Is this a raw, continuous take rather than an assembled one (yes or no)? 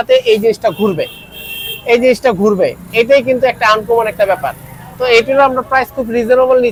yes